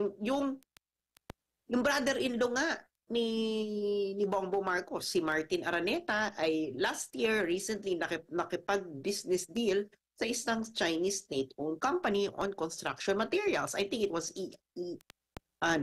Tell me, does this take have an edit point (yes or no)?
no